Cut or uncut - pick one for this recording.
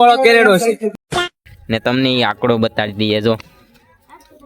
cut